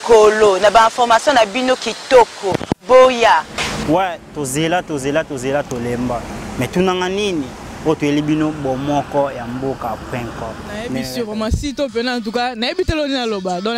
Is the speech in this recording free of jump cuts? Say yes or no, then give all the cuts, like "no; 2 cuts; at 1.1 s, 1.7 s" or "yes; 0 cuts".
no; 1 cut; at 11.0 s